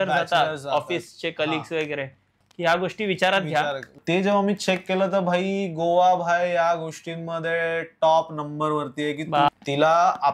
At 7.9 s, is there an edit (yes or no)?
no